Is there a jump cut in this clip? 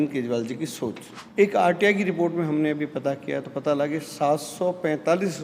yes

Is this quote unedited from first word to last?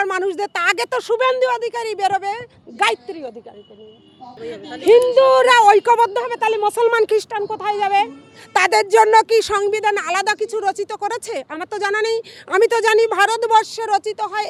yes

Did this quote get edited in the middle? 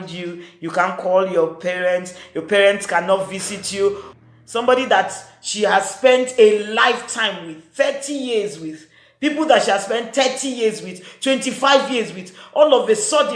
yes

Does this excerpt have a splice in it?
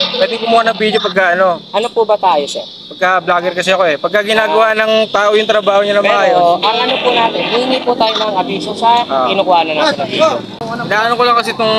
yes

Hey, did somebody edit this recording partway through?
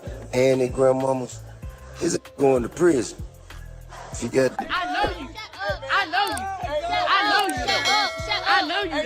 yes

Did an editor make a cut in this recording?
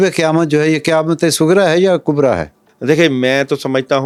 no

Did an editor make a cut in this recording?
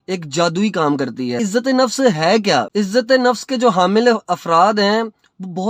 yes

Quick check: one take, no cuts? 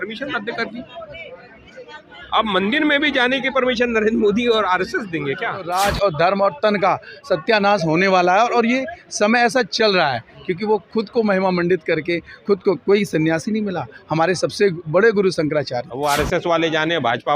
no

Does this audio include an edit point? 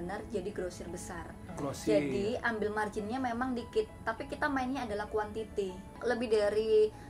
yes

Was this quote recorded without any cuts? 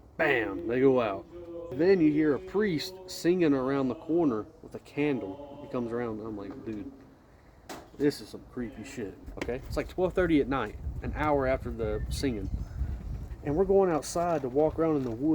no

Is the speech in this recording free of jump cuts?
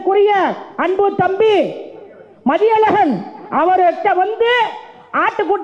yes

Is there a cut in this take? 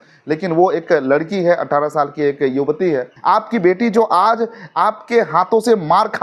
yes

